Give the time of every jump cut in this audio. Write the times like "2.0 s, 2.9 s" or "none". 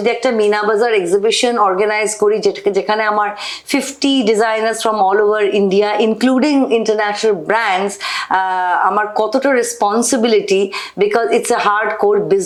none